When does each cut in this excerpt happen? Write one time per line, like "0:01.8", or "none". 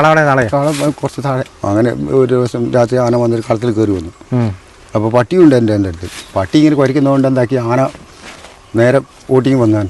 0:01.5